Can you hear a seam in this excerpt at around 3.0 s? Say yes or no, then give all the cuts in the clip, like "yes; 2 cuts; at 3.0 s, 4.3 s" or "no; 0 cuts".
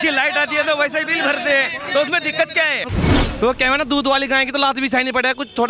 yes; 1 cut; at 3.0 s